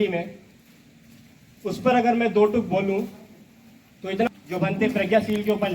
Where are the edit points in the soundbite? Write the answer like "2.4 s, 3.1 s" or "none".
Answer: 4.3 s